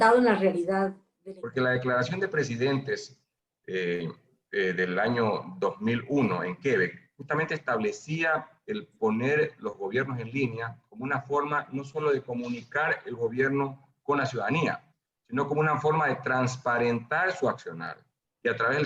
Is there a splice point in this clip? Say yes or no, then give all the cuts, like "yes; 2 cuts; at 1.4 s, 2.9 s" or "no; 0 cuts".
yes; 1 cut; at 1.1 s